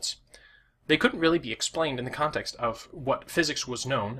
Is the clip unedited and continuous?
yes; 0 cuts

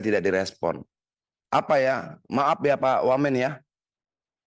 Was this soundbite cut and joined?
no; 0 cuts

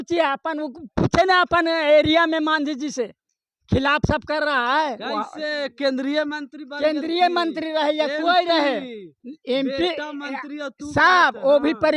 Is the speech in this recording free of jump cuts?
yes; 0 cuts

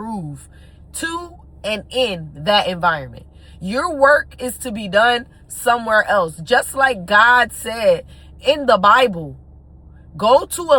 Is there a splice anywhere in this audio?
no; 0 cuts

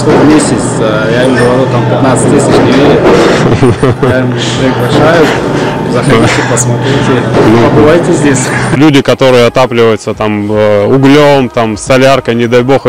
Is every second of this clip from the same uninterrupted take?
no; 1 cut; at 8.8 s

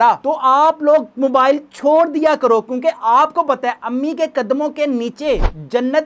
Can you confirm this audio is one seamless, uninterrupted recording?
yes; 0 cuts

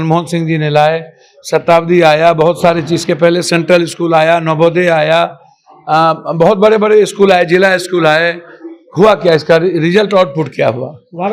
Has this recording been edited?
no; 0 cuts

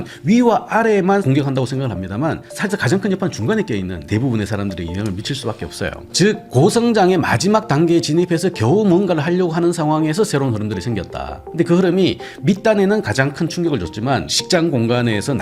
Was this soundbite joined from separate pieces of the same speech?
yes; 4 cuts; at 1.2 s, 4.0 s, 6.1 s, 14.3 s

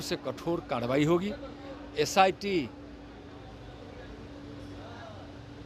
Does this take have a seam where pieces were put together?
no; 0 cuts

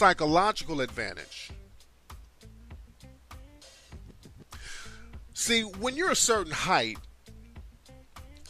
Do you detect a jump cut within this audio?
no; 0 cuts

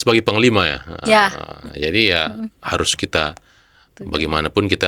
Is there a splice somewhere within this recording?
no; 0 cuts

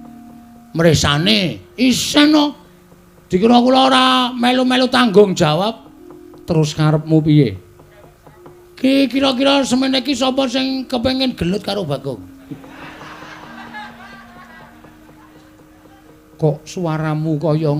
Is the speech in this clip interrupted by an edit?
no; 0 cuts

